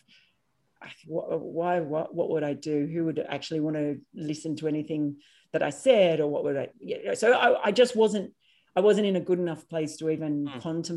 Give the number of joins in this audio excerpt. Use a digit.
0